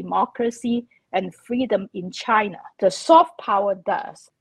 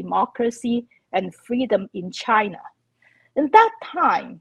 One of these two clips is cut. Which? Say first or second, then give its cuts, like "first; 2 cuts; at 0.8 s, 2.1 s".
first; 1 cut; at 2.7 s